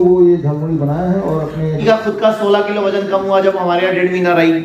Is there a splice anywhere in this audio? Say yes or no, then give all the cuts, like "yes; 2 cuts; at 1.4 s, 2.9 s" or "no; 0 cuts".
yes; 1 cut; at 1.8 s